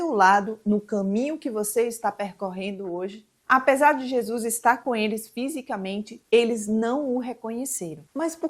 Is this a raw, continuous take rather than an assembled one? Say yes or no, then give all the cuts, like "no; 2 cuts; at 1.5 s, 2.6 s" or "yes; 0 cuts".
yes; 0 cuts